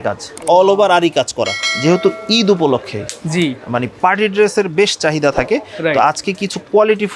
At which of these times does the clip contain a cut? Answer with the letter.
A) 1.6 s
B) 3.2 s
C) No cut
A